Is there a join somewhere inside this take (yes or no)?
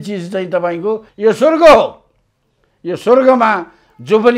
yes